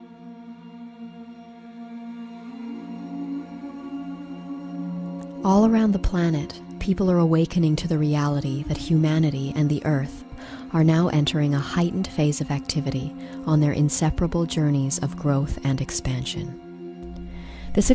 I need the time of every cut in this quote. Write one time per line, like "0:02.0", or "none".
0:04.1

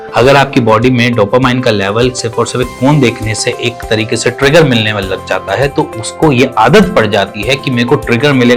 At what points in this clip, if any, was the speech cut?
none

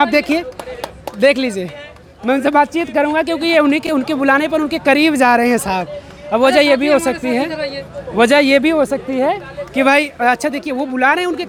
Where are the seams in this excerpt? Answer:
none

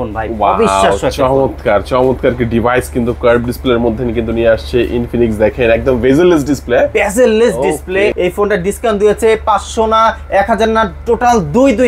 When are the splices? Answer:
0:08.1

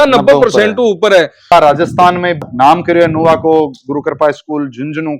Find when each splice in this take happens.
0:01.5

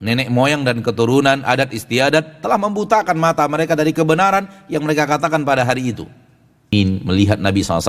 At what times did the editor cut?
0:06.7

